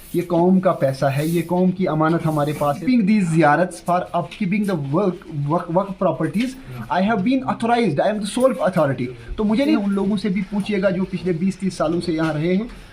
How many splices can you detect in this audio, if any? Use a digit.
2